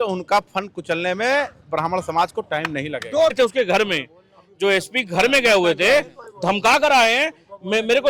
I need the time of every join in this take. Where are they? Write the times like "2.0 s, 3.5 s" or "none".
3.3 s